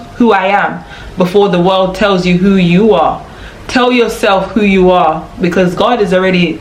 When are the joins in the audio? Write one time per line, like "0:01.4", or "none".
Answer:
none

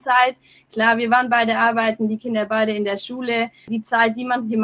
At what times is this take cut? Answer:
0:03.7

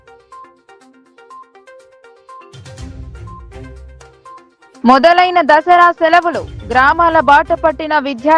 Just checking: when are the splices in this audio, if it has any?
0:01.5
0:04.4

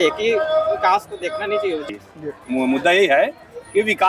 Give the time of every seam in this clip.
0:01.8

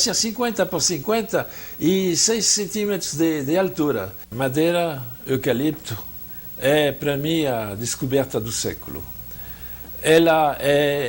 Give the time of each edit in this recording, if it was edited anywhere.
0:04.2

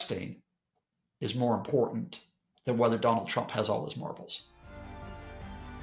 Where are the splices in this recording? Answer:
0:04.6

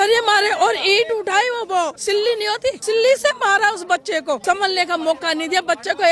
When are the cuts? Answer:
0:02.3
0:04.4

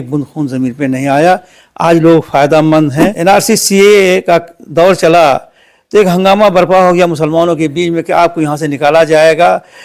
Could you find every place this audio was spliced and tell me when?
0:03.1

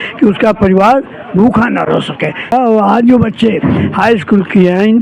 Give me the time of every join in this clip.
0:02.5

